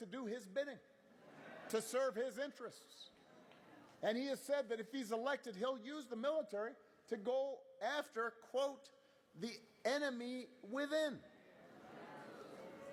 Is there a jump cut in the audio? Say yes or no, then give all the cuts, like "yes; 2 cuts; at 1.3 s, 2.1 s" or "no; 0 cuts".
no; 0 cuts